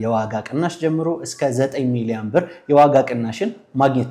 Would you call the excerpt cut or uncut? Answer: uncut